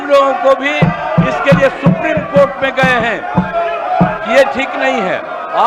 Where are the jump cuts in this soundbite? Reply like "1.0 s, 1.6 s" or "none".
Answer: none